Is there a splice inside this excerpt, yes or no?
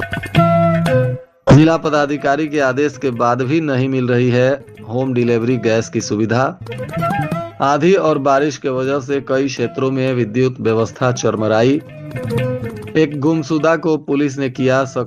yes